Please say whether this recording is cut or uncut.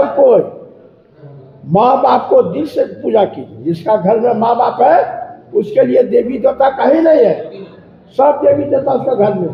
uncut